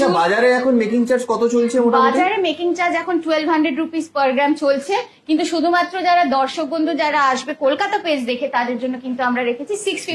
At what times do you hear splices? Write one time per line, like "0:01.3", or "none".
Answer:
none